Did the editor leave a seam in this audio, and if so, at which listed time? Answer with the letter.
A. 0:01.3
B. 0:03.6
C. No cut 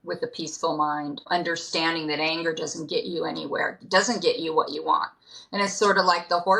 A